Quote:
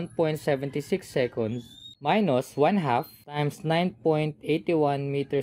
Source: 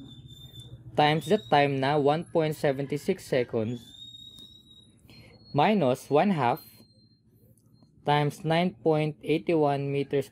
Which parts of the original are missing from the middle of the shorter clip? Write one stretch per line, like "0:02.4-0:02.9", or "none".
0:04.2-0:05.6
0:06.9-0:08.2